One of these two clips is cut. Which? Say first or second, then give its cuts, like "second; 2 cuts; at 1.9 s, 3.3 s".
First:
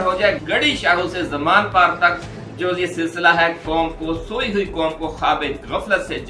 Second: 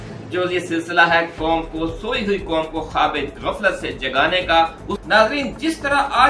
second; 1 cut; at 5.0 s